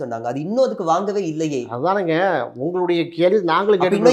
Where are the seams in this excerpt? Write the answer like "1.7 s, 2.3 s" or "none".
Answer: none